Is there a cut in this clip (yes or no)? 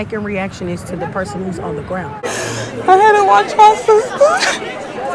yes